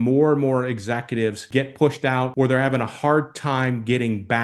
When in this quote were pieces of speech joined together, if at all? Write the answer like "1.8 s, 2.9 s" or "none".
1.4 s, 2.3 s